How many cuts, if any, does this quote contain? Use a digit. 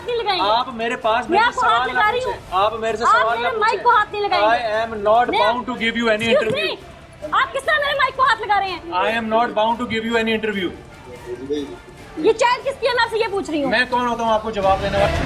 0